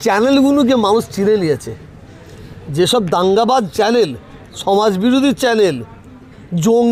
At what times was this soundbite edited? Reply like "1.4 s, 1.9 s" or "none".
none